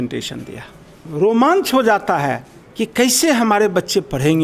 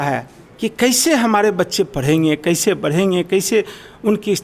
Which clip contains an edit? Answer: first; 1 cut; at 1.2 s

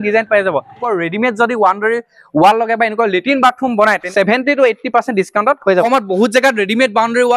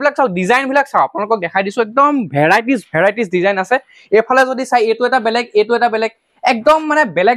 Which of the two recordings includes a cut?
first; 3 cuts; at 0.8 s, 4.0 s, 5.8 s

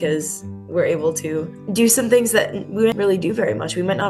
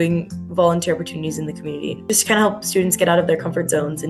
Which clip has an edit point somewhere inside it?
second; 1 cut; at 2.0 s

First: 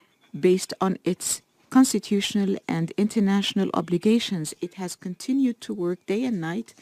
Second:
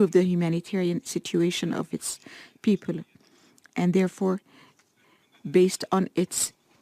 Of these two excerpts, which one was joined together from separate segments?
second; 1 cut; at 2.8 s

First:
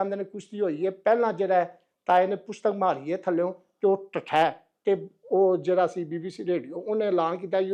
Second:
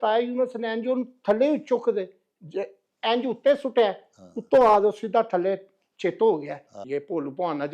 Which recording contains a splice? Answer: second; 1 cut; at 6.8 s

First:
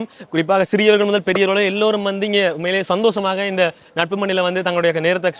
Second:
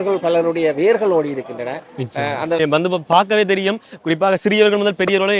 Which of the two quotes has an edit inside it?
second; 1 cut; at 2.6 s

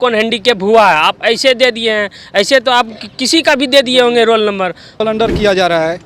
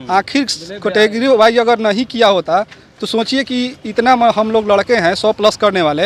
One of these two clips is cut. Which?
first; 1 cut; at 5.0 s

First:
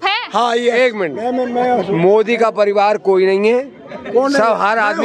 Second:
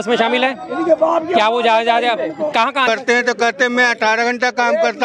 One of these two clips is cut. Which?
second; 1 cut; at 2.9 s

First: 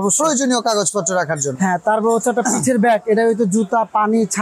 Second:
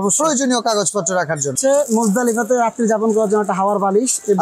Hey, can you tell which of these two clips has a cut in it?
second; 1 cut; at 1.5 s

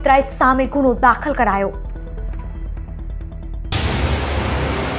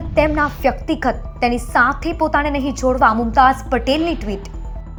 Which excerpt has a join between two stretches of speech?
first; 1 cut; at 3.8 s

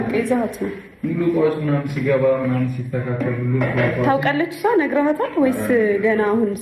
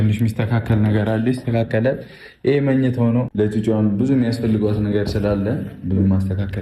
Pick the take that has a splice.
second; 1 cut; at 3.3 s

